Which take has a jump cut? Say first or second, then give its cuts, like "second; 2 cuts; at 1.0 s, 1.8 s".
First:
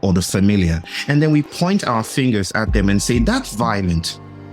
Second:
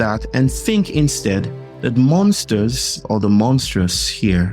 second; 1 cut; at 3.0 s